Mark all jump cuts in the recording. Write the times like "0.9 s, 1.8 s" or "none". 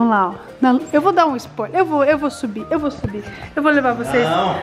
none